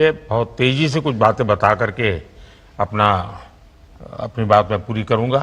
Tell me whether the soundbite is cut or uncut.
cut